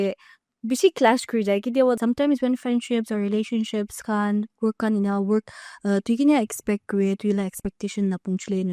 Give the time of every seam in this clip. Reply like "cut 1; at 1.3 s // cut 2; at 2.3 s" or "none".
cut 1; at 2.0 s